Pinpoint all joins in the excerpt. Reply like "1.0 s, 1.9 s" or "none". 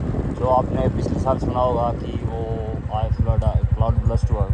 none